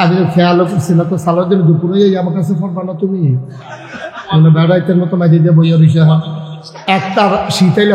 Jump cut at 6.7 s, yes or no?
yes